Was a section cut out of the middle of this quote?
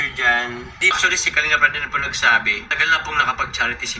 yes; 1 cut; at 1.0 s

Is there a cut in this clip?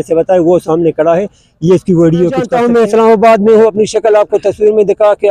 yes; 1 cut; at 2.5 s

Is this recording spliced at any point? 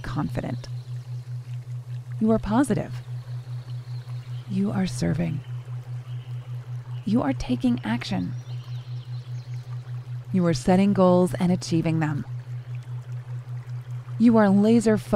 yes; 2 cuts; at 12.3 s, 14.0 s

